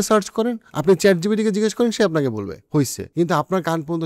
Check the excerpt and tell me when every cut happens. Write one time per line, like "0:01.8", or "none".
0:02.9